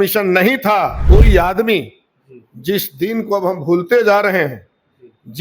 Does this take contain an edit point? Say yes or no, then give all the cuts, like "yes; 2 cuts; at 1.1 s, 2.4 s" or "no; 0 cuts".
yes; 1 cut; at 1.0 s